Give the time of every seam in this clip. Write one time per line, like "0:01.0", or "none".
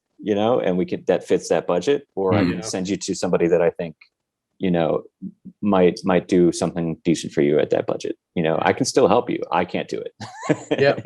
none